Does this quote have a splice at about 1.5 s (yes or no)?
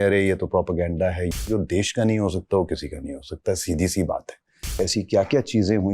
yes